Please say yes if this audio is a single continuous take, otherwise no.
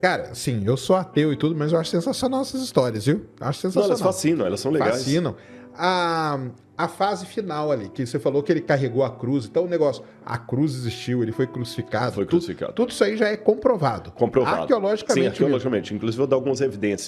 yes